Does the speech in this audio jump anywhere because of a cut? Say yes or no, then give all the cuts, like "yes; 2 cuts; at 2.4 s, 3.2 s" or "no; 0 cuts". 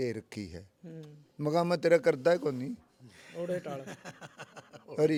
no; 0 cuts